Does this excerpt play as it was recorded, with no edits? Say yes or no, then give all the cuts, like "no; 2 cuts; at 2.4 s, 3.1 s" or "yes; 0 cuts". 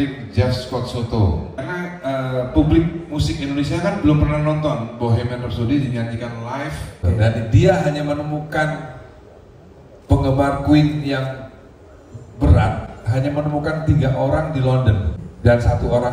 no; 3 cuts; at 1.5 s, 7.0 s, 15.2 s